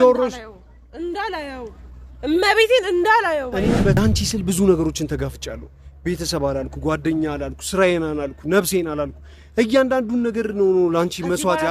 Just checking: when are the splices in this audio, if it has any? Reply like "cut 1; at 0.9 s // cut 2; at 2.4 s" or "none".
cut 1; at 4.0 s

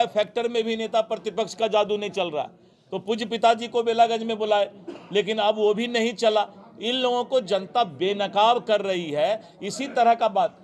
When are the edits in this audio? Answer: none

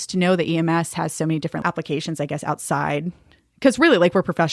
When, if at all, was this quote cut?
cut 1; at 1.6 s

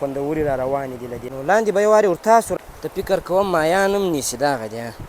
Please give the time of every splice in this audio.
cut 1; at 1.2 s // cut 2; at 2.5 s

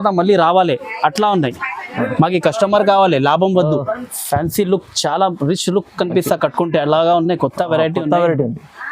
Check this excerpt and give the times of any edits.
cut 1; at 4.1 s

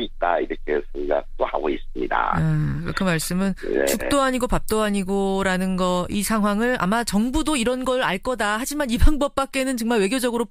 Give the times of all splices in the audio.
cut 1; at 2.0 s

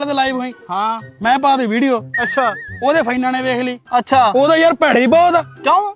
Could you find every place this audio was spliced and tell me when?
none

